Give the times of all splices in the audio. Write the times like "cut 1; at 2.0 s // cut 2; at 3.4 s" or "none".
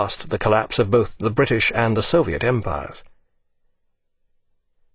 none